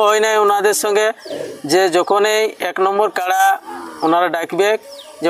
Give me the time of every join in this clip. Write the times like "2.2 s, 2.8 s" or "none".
none